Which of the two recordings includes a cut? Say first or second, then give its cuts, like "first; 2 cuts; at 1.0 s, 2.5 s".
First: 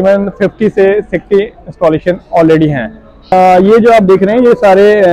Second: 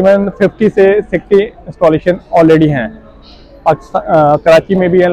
first; 1 cut; at 3.3 s